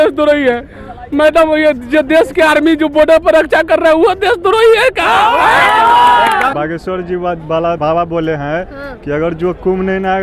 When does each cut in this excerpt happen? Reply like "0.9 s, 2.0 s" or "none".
6.5 s, 7.8 s